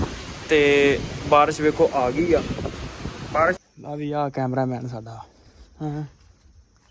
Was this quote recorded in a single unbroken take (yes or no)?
no